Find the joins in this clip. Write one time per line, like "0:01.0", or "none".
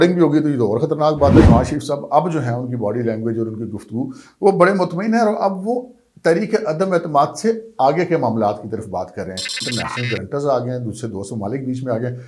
0:01.4
0:09.6